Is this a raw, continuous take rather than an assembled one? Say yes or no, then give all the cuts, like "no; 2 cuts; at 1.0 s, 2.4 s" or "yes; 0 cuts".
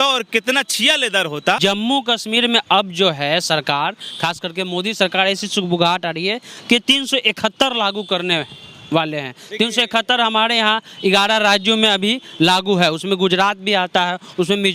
no; 1 cut; at 1.6 s